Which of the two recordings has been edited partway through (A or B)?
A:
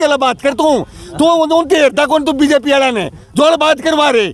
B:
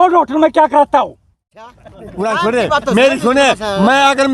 B